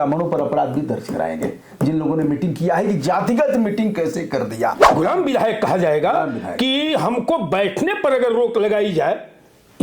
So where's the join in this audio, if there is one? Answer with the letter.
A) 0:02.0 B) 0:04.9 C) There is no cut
B